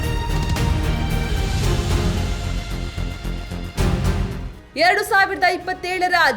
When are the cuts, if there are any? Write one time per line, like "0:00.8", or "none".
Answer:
0:04.6